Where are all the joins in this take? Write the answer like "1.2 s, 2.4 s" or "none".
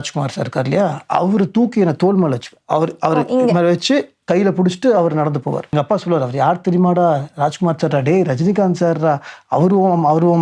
5.7 s